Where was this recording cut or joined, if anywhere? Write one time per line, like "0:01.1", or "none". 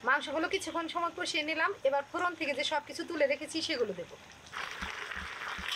0:04.5